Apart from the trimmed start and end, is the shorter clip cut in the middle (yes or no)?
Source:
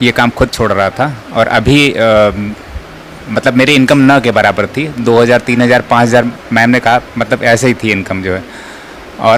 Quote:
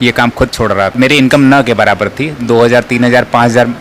yes